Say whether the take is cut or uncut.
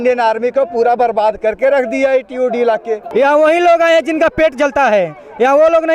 cut